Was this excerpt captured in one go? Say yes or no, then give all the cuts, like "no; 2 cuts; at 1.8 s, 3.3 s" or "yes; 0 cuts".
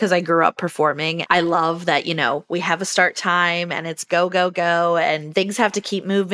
no; 2 cuts; at 1.1 s, 5.2 s